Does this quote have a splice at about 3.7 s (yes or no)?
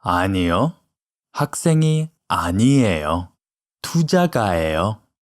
no